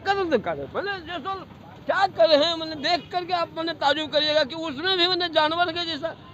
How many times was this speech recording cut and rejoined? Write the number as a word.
zero